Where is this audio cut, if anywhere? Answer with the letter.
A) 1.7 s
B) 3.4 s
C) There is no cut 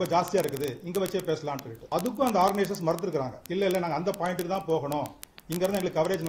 A